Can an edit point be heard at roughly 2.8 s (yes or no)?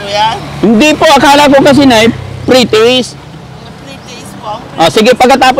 no